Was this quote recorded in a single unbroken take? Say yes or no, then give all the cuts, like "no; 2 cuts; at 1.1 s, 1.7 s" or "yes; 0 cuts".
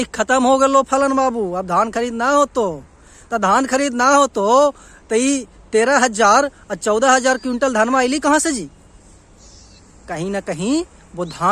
yes; 0 cuts